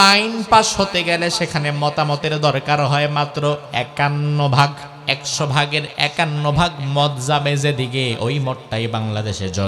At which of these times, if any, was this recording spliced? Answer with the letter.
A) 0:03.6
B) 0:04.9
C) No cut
B